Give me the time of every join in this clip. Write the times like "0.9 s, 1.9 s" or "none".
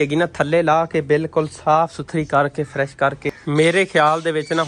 3.4 s